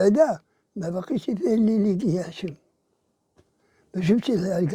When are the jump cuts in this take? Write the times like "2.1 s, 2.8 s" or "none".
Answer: none